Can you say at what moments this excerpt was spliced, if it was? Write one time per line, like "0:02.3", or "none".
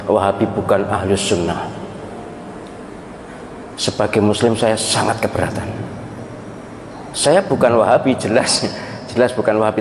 none